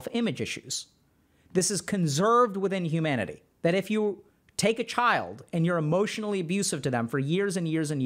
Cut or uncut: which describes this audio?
cut